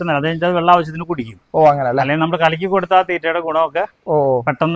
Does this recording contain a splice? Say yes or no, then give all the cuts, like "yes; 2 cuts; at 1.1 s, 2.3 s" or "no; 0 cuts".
no; 0 cuts